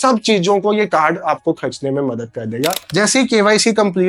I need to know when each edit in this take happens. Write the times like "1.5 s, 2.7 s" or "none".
2.8 s